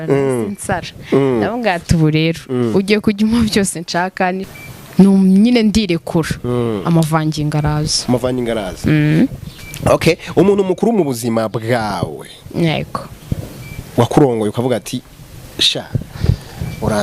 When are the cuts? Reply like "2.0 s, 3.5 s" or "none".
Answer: 4.5 s